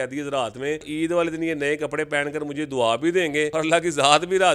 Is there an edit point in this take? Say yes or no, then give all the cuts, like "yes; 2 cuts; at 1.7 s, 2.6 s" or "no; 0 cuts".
yes; 2 cuts; at 0.9 s, 3.5 s